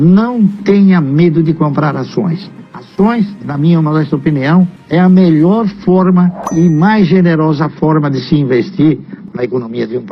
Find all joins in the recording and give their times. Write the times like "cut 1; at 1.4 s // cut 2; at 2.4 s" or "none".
cut 1; at 3.4 s // cut 2; at 9.2 s